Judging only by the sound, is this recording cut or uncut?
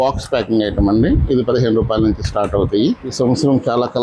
cut